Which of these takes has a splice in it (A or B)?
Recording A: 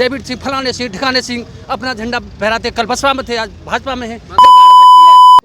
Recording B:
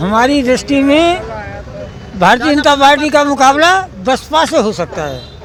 A